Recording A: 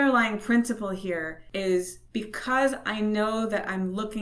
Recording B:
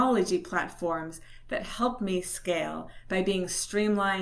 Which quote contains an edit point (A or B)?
A